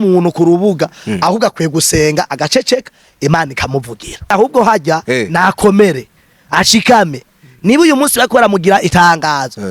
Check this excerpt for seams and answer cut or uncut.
cut